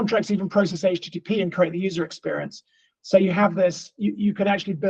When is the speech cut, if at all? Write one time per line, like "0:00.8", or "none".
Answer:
none

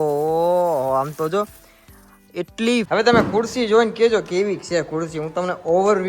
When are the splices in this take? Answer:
0:02.9

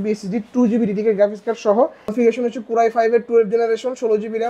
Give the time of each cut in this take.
0:02.1

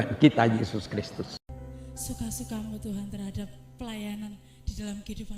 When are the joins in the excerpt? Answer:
0:01.4

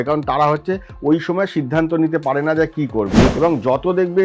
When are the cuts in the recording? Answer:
0:03.3

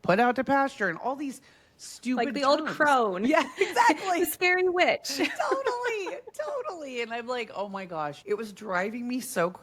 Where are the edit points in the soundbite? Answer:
0:08.2

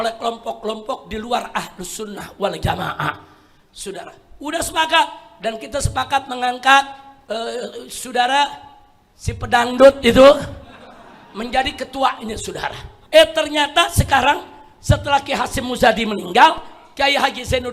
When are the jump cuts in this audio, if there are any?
0:12.9

